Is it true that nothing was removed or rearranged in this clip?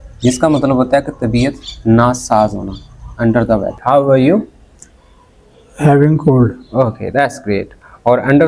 no; 1 cut; at 3.7 s

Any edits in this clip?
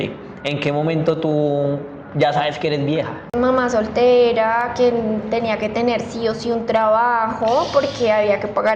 yes; 1 cut; at 3.3 s

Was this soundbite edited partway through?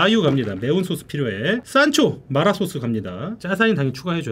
no; 0 cuts

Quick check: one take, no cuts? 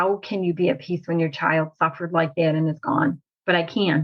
yes; 0 cuts

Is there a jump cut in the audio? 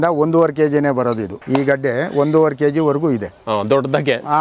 no; 0 cuts

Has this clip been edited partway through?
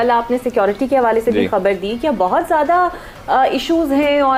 no; 0 cuts

